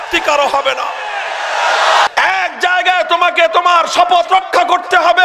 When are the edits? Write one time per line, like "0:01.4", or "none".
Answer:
0:02.1